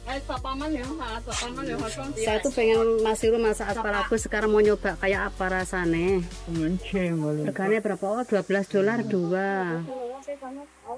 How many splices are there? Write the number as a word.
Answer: zero